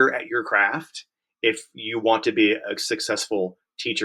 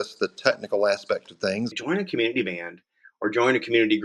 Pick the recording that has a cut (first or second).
second